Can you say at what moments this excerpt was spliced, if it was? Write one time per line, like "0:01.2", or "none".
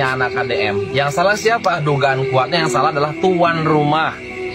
none